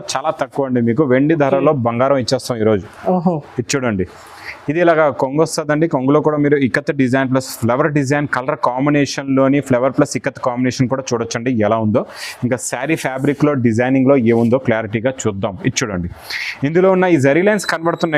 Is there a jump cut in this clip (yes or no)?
no